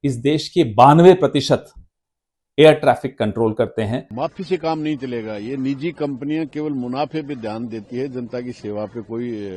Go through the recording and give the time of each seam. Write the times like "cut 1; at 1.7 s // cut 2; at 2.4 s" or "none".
cut 1; at 4.1 s

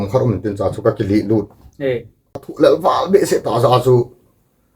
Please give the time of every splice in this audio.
cut 1; at 2.5 s

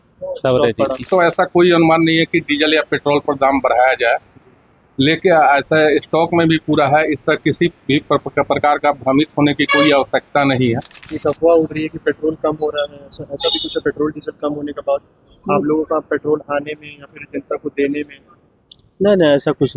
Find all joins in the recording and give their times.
cut 1; at 1.1 s // cut 2; at 11.0 s

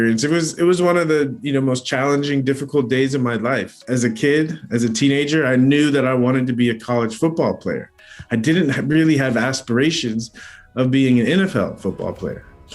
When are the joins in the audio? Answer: cut 1; at 3.7 s

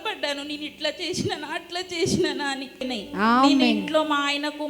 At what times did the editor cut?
cut 1; at 2.8 s

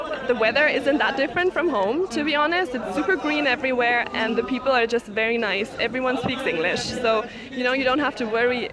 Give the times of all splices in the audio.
none

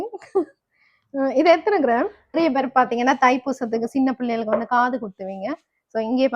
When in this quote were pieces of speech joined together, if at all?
cut 1; at 2.3 s

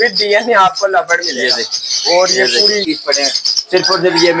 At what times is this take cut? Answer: cut 1; at 2.8 s

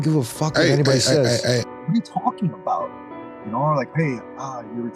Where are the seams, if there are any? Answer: cut 1; at 1.7 s

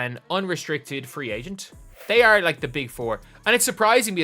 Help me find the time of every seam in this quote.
cut 1; at 1.9 s

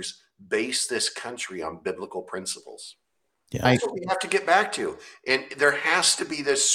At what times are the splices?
cut 1; at 3.6 s

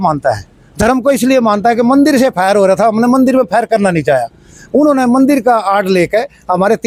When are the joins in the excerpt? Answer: none

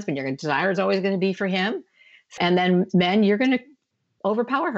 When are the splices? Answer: cut 1; at 2.3 s

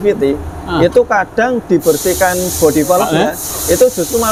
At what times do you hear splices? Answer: none

